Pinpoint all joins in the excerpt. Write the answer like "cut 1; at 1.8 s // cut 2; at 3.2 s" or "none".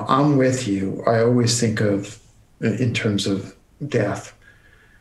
cut 1; at 3.6 s